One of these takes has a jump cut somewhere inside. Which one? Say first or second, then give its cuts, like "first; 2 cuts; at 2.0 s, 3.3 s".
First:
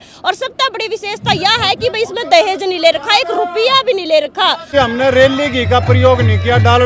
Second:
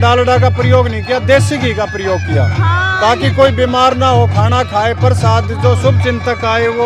first; 1 cut; at 4.7 s